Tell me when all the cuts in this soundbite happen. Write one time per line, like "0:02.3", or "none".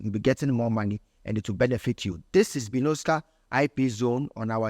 none